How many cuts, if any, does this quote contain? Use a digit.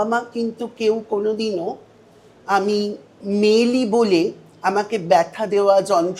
1